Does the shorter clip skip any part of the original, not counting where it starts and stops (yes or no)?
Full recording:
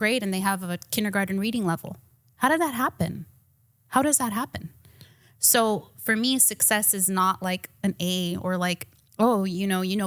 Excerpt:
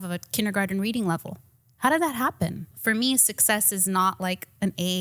yes